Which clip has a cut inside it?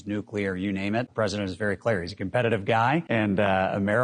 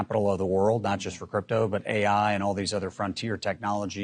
first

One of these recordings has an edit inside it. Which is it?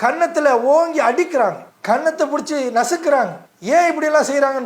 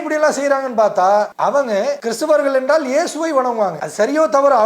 second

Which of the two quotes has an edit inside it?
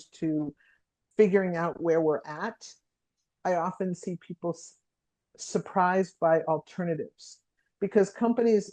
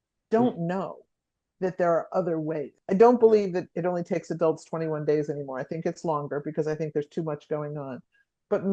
second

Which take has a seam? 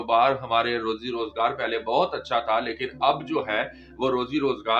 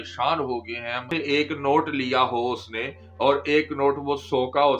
second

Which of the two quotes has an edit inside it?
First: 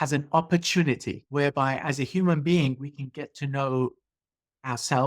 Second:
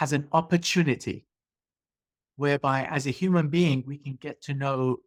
first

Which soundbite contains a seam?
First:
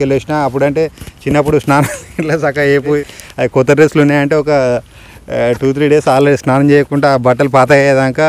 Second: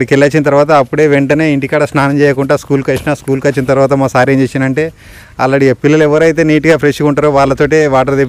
first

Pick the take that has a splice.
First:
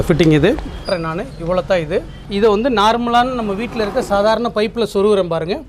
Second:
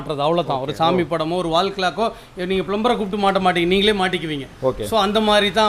first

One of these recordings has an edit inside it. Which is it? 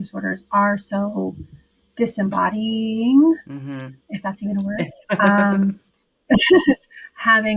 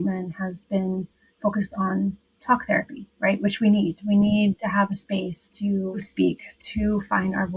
second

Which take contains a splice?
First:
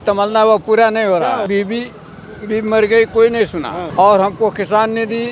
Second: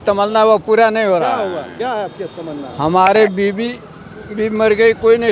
first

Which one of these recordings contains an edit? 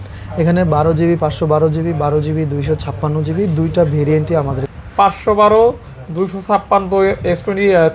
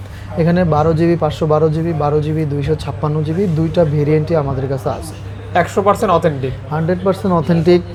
first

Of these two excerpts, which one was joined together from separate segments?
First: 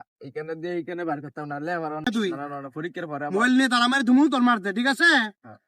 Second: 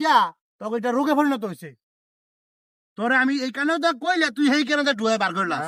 first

